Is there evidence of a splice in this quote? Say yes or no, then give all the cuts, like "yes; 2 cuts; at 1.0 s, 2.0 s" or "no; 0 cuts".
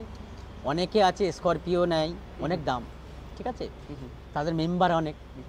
no; 0 cuts